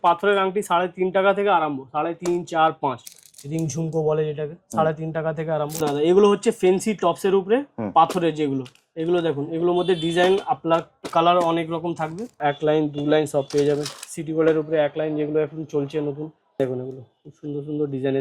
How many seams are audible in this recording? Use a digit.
4